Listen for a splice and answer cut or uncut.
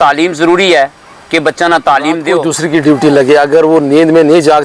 cut